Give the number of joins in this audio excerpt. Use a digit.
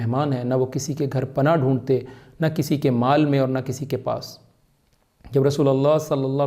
0